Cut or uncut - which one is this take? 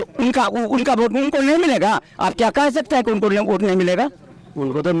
uncut